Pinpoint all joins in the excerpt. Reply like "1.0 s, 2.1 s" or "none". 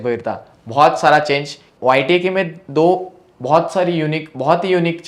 1.7 s